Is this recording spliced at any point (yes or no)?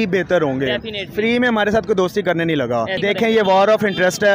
yes